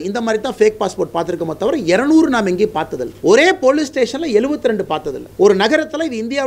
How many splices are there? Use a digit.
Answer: 2